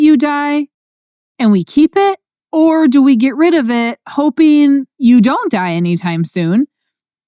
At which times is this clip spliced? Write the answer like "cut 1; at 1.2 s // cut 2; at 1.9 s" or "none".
cut 1; at 4.9 s

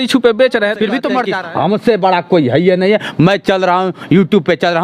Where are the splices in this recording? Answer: cut 1; at 1.3 s

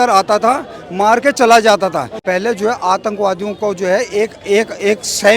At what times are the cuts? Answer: cut 1; at 2.1 s

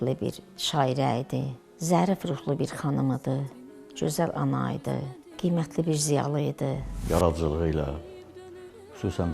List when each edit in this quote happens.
cut 1; at 1.6 s // cut 2; at 5.2 s // cut 3; at 6.9 s

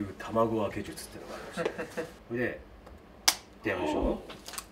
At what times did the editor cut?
cut 1; at 2.2 s

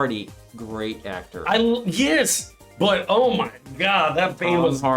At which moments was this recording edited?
none

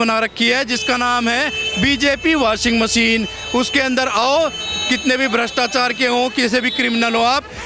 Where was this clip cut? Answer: none

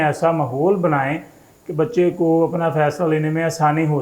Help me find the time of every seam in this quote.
none

